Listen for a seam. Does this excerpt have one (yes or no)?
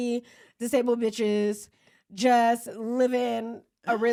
no